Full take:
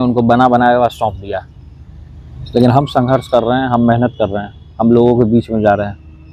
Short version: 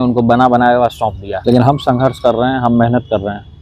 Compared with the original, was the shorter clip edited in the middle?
yes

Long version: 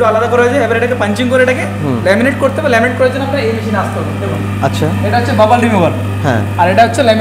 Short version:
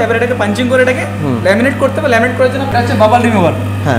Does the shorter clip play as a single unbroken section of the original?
no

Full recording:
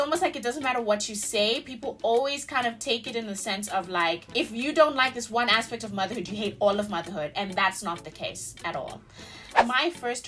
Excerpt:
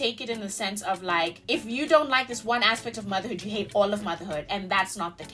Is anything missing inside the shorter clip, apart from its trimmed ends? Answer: no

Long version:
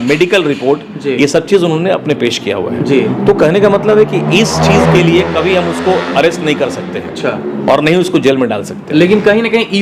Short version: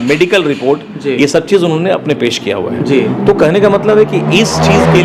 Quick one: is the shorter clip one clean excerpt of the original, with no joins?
yes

